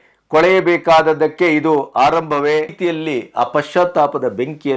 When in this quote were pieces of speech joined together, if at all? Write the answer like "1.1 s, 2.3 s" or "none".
2.8 s